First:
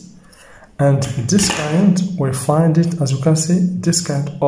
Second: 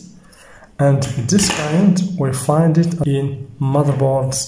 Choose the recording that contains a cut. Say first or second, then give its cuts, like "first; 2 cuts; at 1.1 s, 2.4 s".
second; 1 cut; at 3.0 s